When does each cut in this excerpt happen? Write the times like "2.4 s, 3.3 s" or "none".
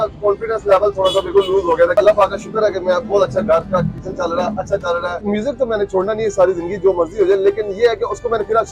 1.9 s, 5.2 s

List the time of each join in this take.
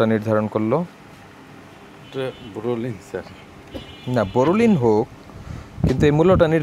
none

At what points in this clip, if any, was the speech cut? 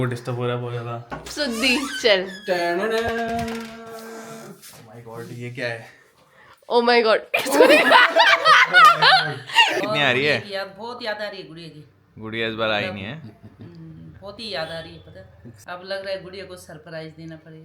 9.8 s, 15.5 s

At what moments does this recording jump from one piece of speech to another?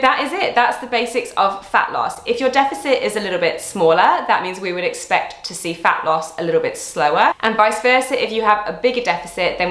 none

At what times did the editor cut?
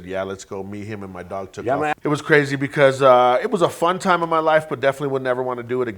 2.0 s

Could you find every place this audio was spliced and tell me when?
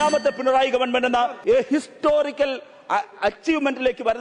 1.4 s

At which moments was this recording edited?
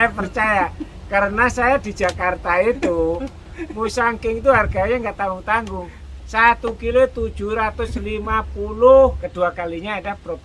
9.2 s

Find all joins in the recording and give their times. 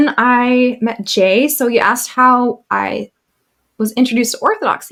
none

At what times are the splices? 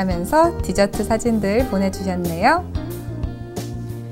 2.6 s

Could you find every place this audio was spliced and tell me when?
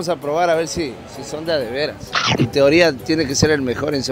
2.4 s

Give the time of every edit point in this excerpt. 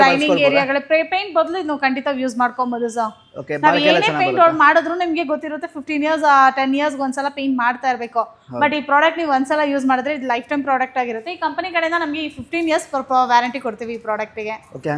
none

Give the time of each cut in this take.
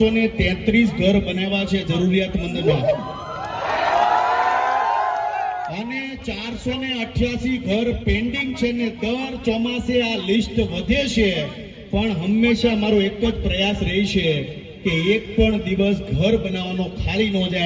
none

